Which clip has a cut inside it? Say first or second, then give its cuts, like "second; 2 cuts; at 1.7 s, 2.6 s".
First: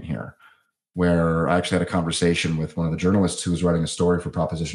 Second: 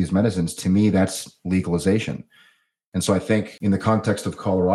second; 1 cut; at 3.5 s